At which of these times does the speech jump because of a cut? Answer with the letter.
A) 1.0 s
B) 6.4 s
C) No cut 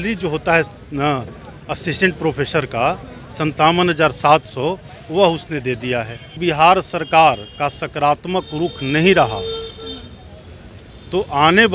B